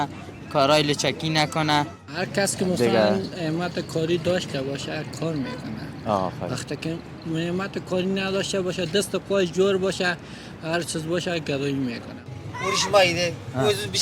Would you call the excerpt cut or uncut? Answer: cut